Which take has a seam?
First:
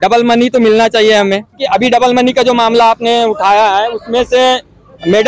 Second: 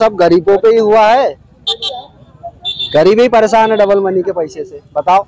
first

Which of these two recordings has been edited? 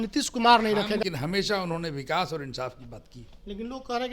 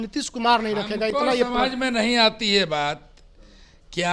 first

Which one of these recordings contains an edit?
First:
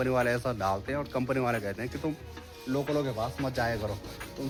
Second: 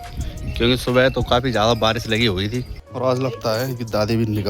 second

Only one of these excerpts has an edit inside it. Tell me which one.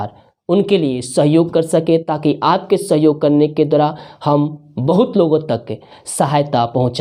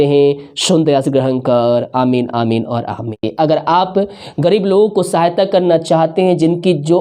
second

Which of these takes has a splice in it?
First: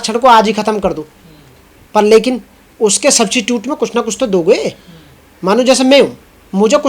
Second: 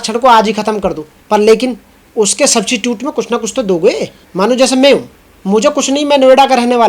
second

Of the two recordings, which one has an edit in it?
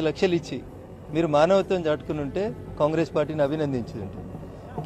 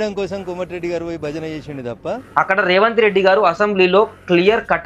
second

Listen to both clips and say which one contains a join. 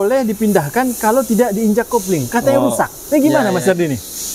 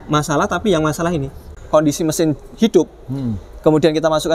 second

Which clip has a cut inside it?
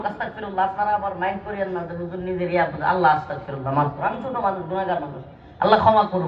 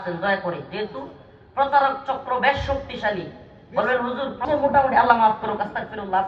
second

